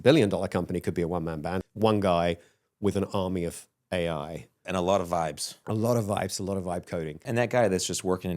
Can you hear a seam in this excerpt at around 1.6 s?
yes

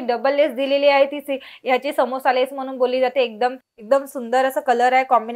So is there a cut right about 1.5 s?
no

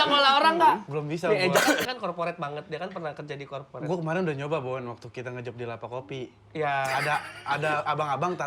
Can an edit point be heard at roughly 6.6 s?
no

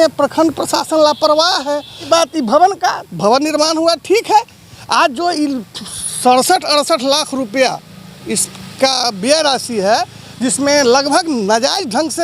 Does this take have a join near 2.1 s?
yes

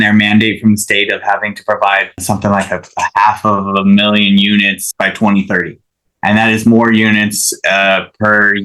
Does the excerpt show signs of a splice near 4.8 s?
yes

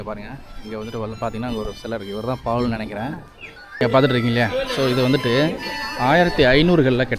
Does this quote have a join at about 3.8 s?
yes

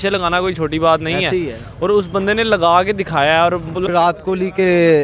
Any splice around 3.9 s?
yes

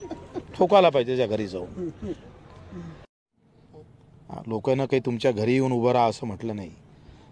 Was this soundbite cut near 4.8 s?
no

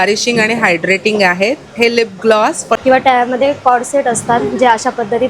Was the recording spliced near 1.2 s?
no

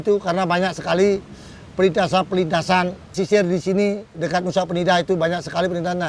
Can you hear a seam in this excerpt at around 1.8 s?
no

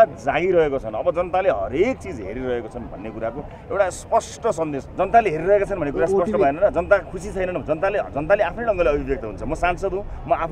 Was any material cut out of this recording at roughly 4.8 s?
yes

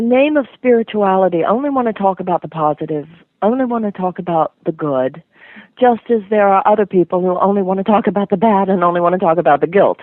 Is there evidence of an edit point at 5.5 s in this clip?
no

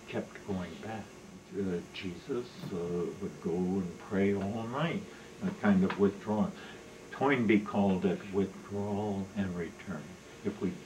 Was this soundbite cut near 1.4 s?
yes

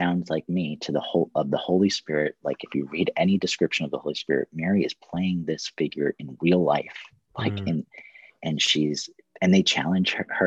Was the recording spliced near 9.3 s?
yes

